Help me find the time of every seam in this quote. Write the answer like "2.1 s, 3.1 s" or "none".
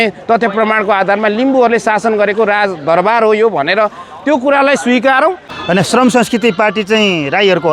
5.5 s

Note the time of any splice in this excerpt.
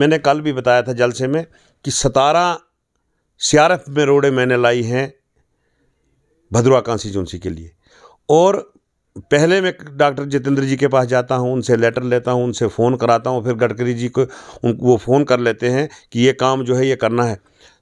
none

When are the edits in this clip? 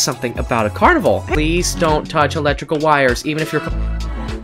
1.3 s

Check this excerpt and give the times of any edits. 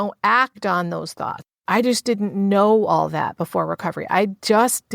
1.5 s

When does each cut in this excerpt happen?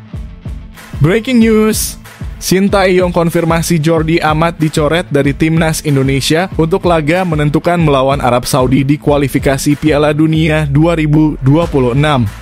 1.0 s

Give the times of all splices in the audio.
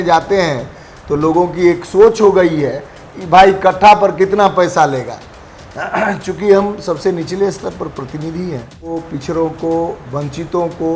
8.9 s

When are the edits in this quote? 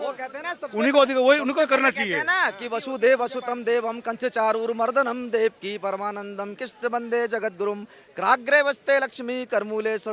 none

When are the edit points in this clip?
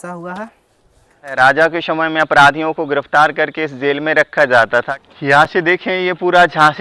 1.4 s, 4.9 s

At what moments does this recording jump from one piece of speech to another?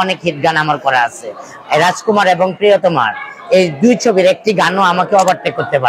none

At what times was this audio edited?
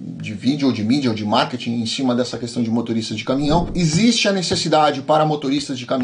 3.7 s

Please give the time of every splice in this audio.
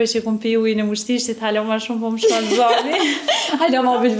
none

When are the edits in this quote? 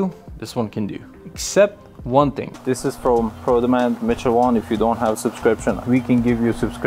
2.5 s

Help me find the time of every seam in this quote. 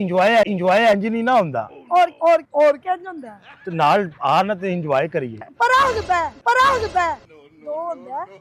5.5 s

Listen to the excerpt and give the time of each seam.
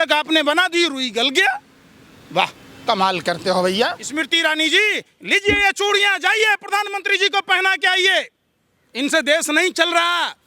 4.1 s

